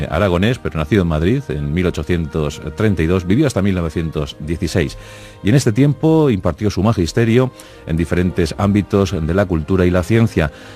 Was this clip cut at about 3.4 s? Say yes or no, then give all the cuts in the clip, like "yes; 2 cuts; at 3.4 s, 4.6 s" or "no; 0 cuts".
yes; 1 cut; at 3.4 s